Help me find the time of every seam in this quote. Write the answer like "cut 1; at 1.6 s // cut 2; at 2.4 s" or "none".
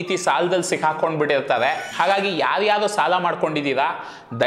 cut 1; at 1.8 s

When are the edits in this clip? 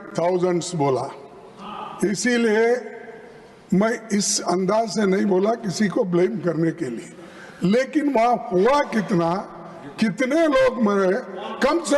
none

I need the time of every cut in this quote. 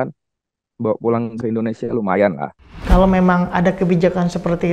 cut 1; at 2.7 s

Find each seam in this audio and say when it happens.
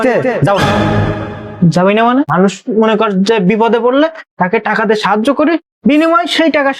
cut 1; at 2.3 s

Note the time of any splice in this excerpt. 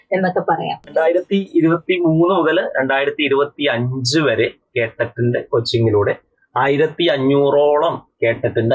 cut 1; at 0.9 s

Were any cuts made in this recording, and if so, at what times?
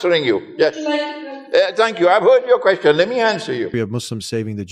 cut 1; at 3.7 s

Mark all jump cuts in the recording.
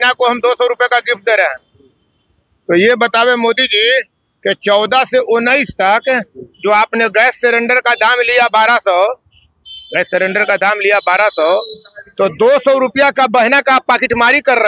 none

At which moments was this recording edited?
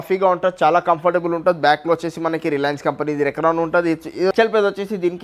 cut 1; at 4.3 s

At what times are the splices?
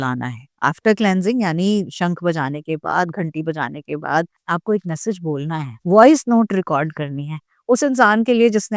cut 1; at 4.3 s

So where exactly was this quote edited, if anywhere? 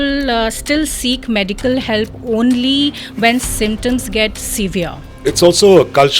cut 1; at 5.1 s

